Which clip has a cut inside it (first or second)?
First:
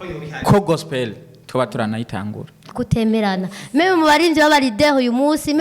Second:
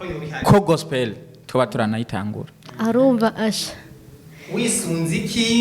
first